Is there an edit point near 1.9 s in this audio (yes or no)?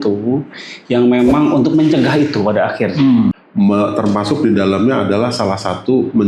no